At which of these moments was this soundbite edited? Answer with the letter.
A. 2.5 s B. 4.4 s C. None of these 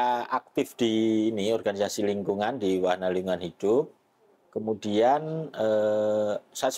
C